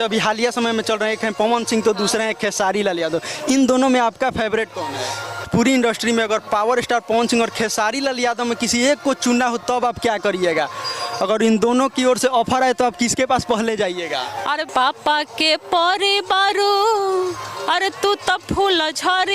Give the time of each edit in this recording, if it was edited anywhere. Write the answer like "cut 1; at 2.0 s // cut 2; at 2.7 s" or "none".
cut 1; at 5.5 s // cut 2; at 14.7 s